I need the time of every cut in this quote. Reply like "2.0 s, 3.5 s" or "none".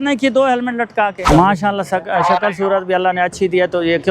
1.3 s

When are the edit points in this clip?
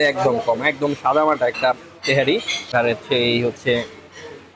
2.3 s

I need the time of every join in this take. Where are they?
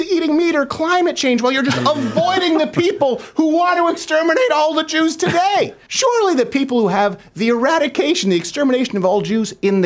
5.8 s

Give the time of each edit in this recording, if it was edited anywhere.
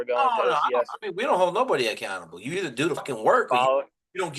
3.0 s

